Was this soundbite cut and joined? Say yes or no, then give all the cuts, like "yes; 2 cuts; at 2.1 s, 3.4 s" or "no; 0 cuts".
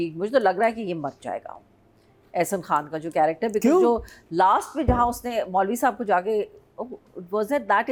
no; 0 cuts